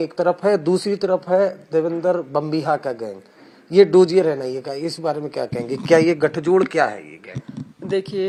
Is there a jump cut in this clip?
no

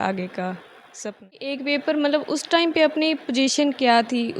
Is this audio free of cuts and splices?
no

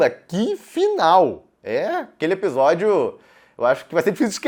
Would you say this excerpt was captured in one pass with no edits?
yes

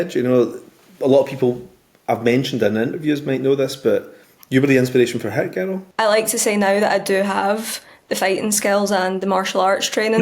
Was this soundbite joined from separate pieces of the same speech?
yes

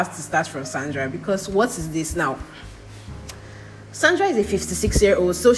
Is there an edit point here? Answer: no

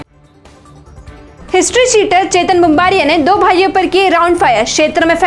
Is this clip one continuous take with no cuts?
no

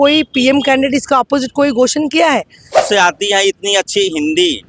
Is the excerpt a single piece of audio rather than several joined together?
no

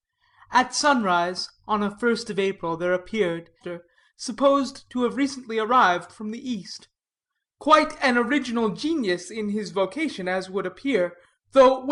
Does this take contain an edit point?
no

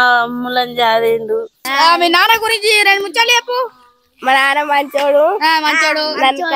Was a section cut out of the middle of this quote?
yes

